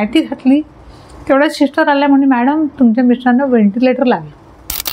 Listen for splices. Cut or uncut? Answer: uncut